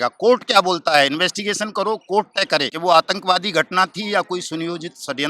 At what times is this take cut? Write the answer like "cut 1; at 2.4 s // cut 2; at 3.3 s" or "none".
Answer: cut 1; at 2.7 s